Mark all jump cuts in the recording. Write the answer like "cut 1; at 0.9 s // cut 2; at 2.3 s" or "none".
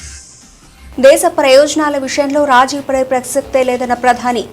cut 1; at 0.9 s